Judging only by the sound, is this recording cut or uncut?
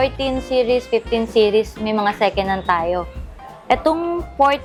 uncut